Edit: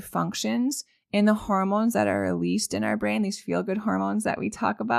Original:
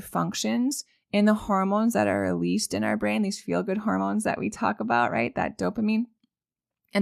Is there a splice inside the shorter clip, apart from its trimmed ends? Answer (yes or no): no